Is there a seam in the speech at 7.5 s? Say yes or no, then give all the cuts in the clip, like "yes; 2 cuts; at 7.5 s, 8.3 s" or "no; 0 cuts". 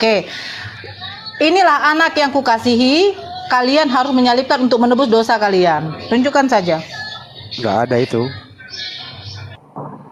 no; 0 cuts